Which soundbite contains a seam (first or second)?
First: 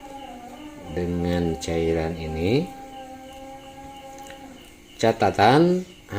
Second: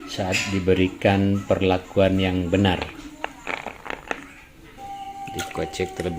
second